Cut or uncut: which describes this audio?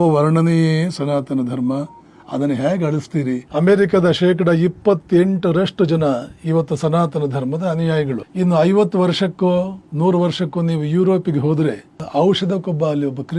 cut